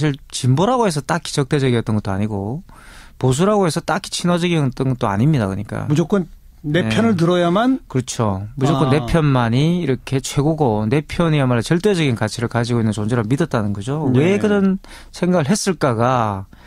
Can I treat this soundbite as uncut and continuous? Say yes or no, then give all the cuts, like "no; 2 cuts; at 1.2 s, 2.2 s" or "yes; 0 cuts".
no; 1 cut; at 8.2 s